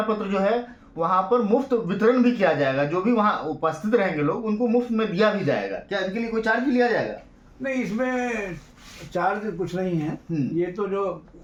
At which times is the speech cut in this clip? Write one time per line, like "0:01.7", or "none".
none